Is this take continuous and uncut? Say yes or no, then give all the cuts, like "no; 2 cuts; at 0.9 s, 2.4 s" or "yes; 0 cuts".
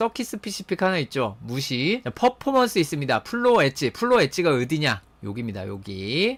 yes; 0 cuts